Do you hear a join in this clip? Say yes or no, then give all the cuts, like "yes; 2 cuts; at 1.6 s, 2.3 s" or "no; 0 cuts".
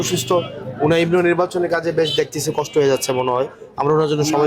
no; 0 cuts